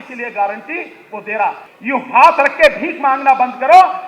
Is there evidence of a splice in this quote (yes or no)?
yes